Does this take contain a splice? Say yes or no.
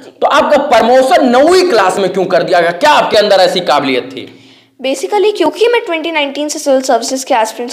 no